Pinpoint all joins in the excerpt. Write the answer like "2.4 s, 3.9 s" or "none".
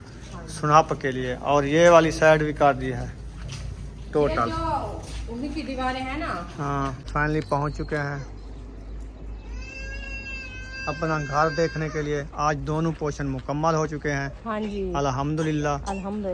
7.1 s